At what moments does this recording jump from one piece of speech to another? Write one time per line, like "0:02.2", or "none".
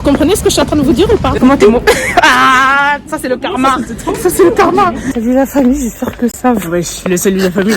0:01.4
0:05.0

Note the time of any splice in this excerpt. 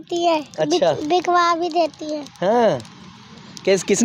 none

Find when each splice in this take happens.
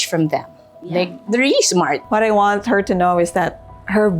0:02.0

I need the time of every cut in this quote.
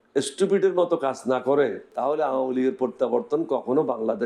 0:01.9

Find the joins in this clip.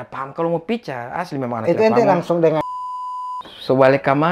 0:03.0

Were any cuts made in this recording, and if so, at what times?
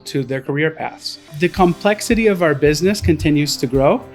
0:01.3

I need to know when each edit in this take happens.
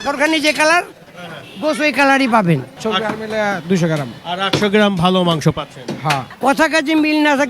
0:02.7
0:06.3

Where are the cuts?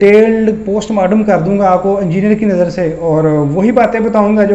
none

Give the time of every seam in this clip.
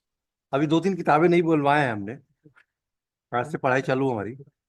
none

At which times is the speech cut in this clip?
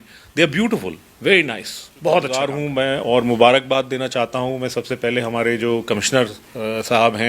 0:02.6

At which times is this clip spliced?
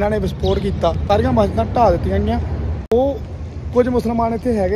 0:01.0
0:02.9

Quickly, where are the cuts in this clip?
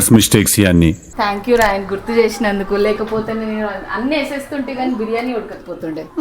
0:01.1

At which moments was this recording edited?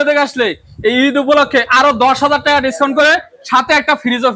0:03.3

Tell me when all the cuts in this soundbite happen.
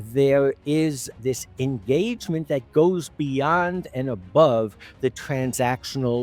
0:01.1

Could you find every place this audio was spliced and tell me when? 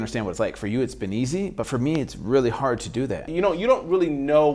0:03.3

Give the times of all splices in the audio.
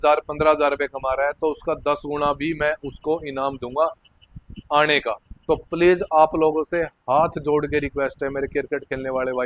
0:05.3

